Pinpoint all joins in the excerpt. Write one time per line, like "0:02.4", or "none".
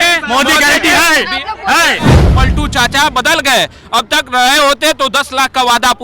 0:02.2